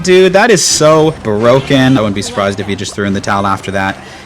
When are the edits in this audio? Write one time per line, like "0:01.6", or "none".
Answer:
0:01.2
0:02.0